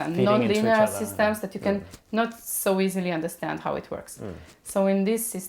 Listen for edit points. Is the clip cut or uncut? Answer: uncut